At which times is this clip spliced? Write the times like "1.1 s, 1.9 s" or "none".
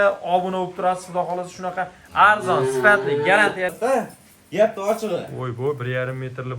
3.7 s

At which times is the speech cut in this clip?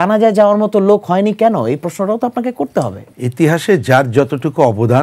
3.0 s

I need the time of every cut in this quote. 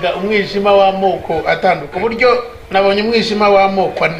1.9 s

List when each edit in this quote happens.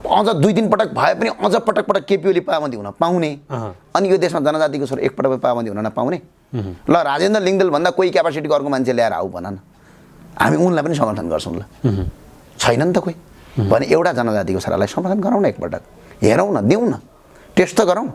none

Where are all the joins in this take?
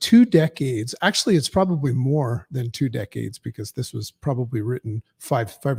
none

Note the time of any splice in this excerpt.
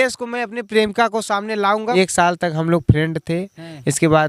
1.8 s

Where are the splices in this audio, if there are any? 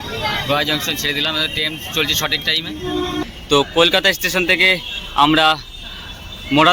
3.2 s

